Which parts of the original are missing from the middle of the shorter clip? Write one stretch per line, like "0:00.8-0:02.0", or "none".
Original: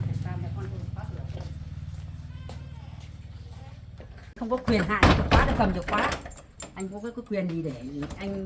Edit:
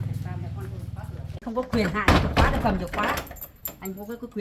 0:01.4-0:04.3